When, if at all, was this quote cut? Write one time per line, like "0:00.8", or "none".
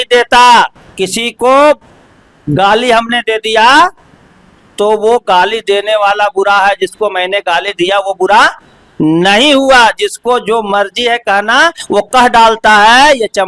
none

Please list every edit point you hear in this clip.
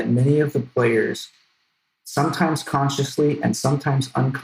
none

